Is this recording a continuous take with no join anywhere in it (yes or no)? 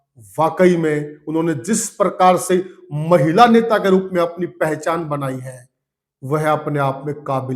yes